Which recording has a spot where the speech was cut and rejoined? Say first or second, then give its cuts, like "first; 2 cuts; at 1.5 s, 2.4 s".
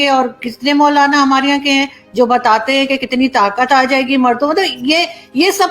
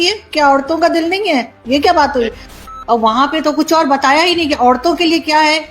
second; 1 cut; at 2.6 s